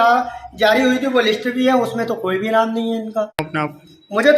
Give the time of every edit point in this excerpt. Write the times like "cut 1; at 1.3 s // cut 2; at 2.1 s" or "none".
cut 1; at 3.3 s